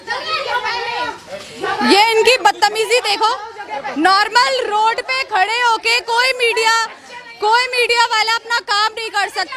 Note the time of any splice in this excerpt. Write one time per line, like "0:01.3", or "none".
none